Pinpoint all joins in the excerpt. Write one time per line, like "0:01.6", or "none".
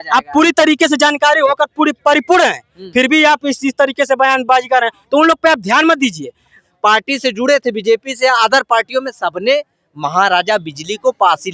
0:06.6